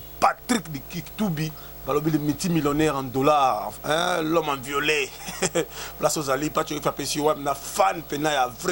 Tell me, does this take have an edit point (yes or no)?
no